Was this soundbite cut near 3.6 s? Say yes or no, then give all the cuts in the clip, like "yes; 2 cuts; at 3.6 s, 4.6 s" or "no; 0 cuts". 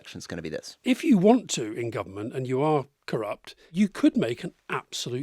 yes; 2 cuts; at 0.8 s, 3.6 s